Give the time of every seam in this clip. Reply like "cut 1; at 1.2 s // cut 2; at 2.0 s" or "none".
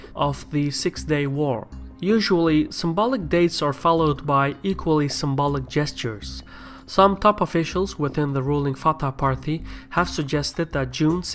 cut 1; at 3.8 s